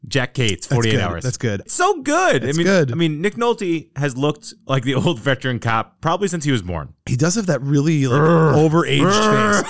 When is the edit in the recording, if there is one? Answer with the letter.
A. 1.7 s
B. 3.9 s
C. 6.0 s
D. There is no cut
A